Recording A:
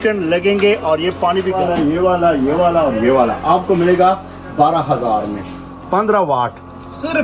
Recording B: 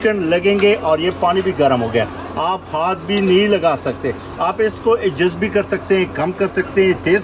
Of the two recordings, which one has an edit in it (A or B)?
A